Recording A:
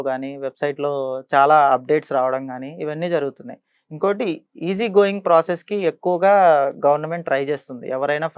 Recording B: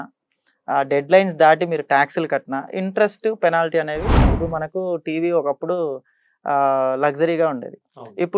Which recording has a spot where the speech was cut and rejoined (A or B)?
B